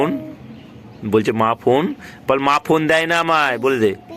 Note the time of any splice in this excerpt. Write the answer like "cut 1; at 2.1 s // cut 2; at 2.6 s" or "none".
none